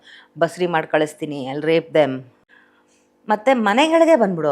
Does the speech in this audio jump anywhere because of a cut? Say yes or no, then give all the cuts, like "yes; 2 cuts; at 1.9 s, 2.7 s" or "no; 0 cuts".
yes; 1 cut; at 2.3 s